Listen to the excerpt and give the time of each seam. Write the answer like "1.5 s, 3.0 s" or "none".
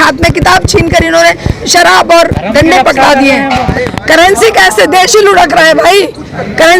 3.7 s